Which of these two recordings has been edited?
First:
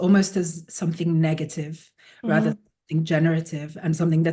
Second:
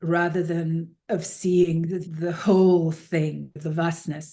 second; 3 cuts; at 0.9 s, 2.1 s, 3.5 s

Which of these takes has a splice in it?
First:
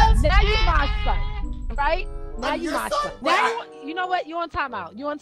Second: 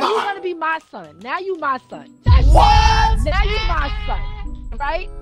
first; 1 cut; at 3.1 s

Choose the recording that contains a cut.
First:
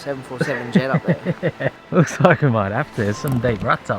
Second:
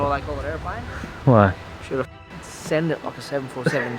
first; 1 cut; at 1.8 s

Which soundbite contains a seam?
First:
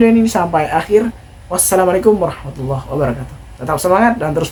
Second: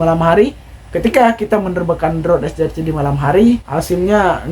second; 1 cut; at 3.6 s

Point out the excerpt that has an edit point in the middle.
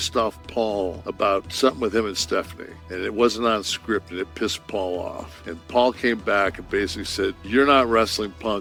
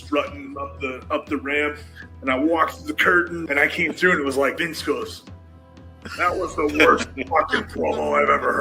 second; 2 cuts; at 3.4 s, 4.6 s

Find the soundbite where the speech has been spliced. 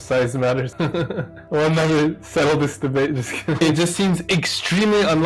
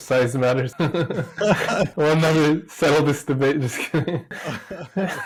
first; 2 cuts; at 1.4 s, 3.6 s

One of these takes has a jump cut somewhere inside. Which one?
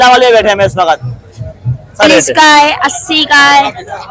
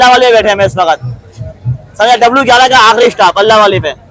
first; 1 cut; at 2.0 s

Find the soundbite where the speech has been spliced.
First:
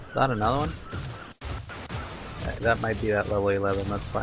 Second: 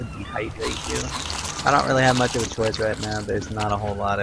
second; 1 cut; at 2.2 s

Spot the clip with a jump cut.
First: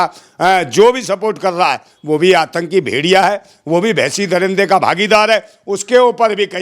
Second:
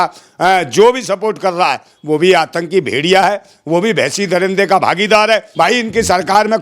second; 1 cut; at 5.5 s

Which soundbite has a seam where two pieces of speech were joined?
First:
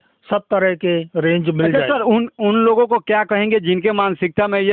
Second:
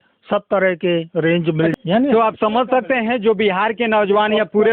second; 1 cut; at 1.7 s

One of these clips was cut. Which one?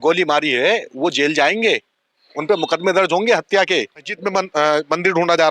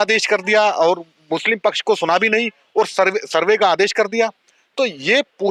first; 1 cut; at 4.1 s

